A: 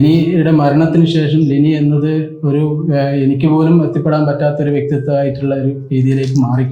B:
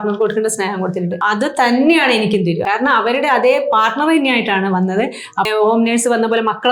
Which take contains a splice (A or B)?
B